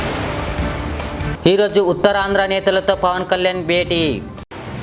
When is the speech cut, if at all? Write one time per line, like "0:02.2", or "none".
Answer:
none